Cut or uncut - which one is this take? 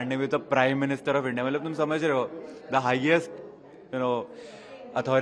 uncut